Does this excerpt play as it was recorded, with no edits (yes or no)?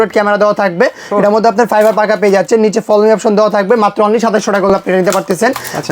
yes